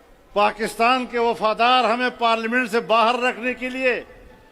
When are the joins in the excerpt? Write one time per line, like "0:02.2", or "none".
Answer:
none